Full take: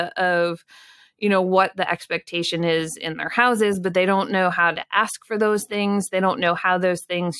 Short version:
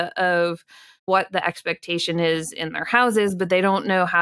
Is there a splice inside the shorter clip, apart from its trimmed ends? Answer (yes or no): yes